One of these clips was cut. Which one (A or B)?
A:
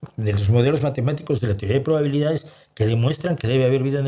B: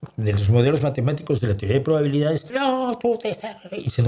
B